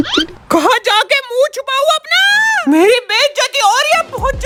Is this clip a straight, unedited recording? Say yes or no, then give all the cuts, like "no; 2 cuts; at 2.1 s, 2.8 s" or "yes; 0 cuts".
yes; 0 cuts